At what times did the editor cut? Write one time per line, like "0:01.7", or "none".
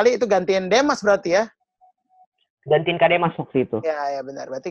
none